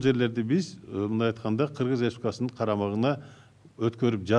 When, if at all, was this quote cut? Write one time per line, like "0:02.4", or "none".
none